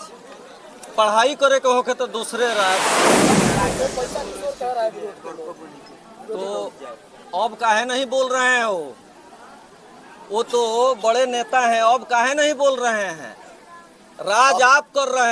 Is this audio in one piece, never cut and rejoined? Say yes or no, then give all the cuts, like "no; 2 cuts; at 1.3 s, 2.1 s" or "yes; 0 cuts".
no; 2 cuts; at 2.8 s, 3.7 s